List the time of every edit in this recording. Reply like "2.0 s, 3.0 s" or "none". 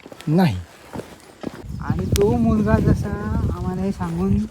1.6 s

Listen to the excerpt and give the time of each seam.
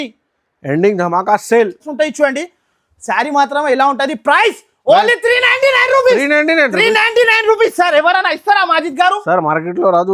1.9 s

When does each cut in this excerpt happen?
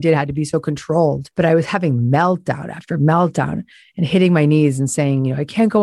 1.2 s

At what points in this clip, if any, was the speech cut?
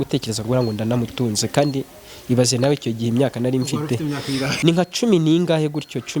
4.5 s

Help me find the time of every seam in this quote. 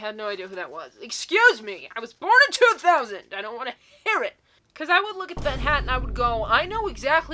4.4 s

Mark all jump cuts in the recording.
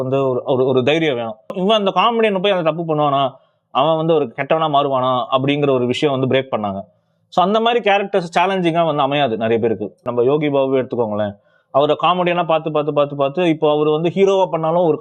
1.6 s, 10.1 s

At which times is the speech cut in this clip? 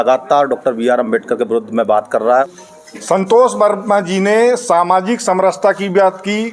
2.5 s

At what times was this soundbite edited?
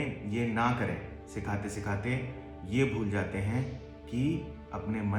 none

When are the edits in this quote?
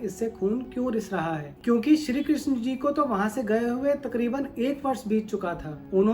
1.5 s

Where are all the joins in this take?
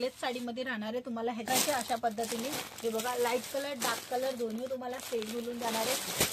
1.5 s

